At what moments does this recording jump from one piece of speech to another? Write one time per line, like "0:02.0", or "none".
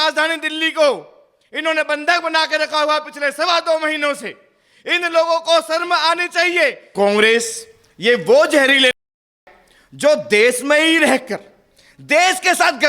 0:06.9